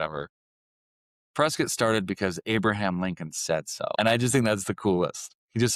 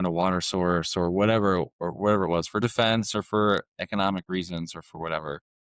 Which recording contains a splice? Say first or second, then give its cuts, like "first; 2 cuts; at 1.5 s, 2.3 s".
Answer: first; 1 cut; at 3.9 s